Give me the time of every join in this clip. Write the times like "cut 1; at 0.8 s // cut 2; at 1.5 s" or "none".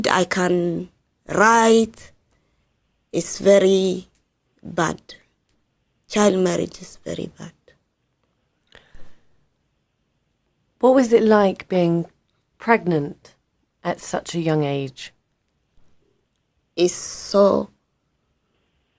none